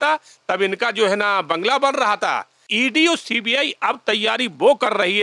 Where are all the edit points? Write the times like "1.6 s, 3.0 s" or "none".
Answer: 2.7 s